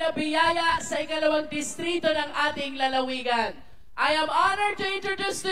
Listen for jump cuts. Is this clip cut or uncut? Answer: uncut